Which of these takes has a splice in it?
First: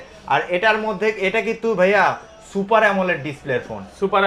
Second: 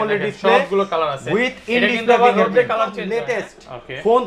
second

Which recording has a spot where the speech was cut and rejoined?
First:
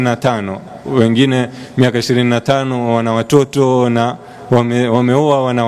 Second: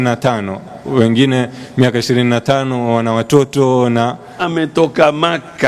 second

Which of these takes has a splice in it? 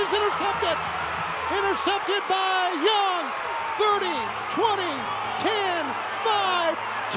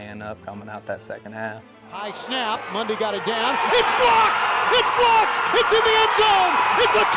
second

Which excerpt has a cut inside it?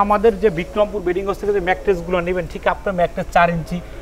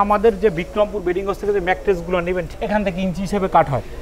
second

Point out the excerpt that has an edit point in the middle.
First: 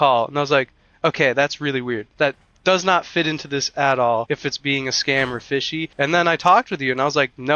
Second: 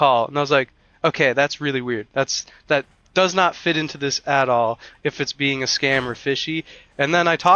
first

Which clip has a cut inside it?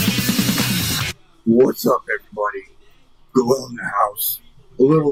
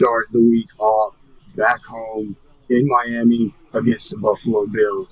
second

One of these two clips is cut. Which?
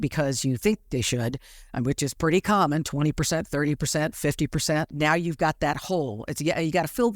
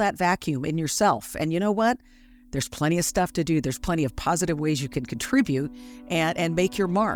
first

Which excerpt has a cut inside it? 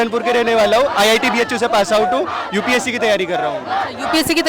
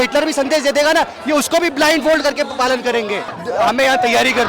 second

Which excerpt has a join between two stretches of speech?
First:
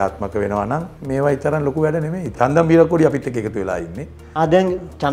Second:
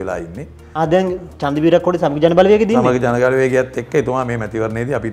first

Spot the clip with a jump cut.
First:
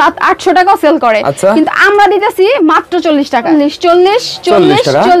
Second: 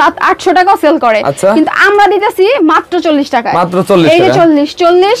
first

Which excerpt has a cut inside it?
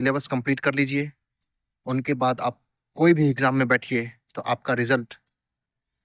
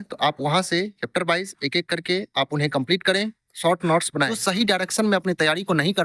second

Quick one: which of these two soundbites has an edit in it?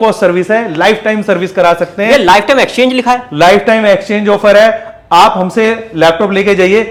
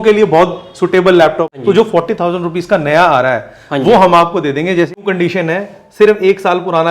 second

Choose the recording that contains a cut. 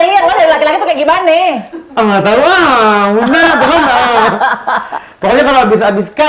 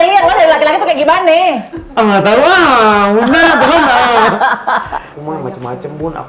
second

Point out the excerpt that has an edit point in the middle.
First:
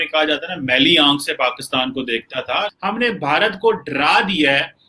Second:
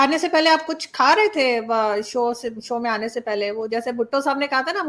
first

